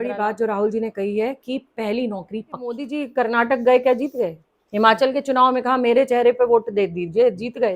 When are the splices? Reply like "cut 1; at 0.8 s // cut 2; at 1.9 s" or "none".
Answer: cut 1; at 2.8 s

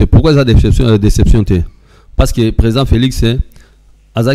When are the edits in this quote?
none

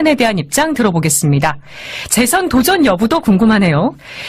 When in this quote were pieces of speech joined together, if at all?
none

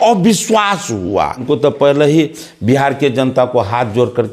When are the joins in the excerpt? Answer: cut 1; at 1.4 s

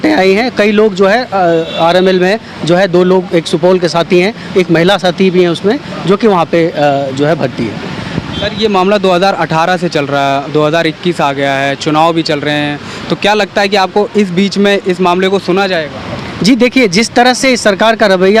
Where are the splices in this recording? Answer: none

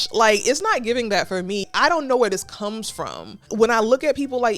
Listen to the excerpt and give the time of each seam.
cut 1; at 1.7 s // cut 2; at 3.4 s

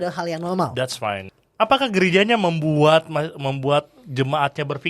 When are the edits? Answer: cut 1; at 1.3 s

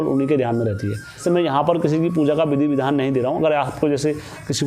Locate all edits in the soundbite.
cut 1; at 1.1 s

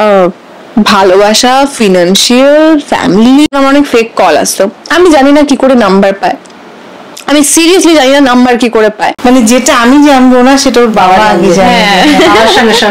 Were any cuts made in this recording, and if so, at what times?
cut 1; at 3.5 s // cut 2; at 9.1 s

